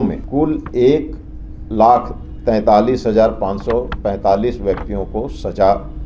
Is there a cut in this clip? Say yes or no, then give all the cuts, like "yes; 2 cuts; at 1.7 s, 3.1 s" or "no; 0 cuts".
no; 0 cuts